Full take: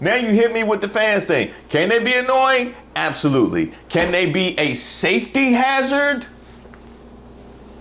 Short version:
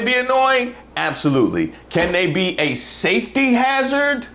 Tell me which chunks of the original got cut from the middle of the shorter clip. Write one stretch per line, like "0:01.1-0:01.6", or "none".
none